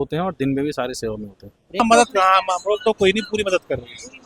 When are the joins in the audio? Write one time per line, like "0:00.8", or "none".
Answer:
0:01.8